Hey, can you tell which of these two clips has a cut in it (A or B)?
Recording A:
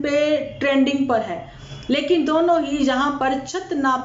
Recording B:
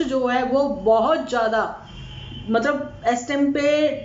A